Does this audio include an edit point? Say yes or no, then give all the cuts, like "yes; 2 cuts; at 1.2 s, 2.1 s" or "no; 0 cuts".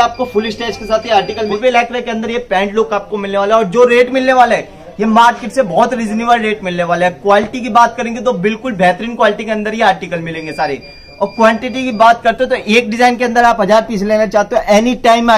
yes; 1 cut; at 1.5 s